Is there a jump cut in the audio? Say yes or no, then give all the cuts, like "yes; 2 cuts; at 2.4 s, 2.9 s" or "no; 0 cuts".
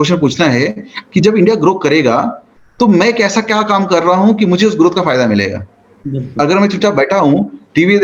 no; 0 cuts